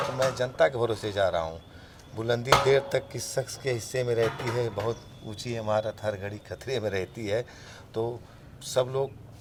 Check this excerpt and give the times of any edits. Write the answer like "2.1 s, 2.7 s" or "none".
none